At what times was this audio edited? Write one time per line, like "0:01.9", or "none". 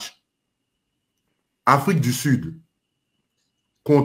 none